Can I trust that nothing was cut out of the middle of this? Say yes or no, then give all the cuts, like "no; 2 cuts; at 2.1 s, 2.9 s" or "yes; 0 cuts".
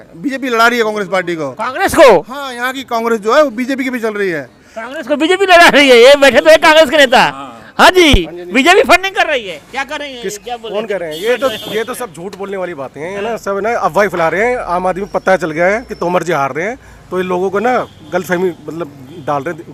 yes; 0 cuts